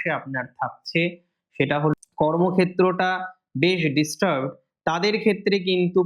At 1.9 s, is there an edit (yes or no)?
yes